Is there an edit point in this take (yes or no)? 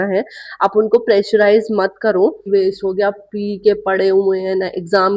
yes